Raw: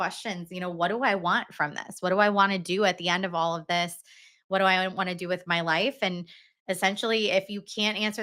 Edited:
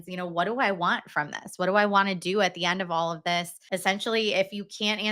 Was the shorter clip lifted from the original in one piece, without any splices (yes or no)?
no